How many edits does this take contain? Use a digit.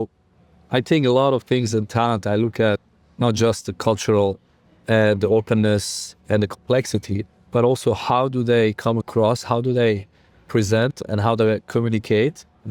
0